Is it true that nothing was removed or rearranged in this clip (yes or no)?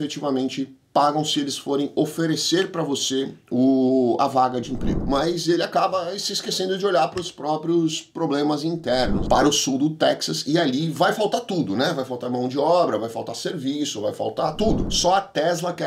no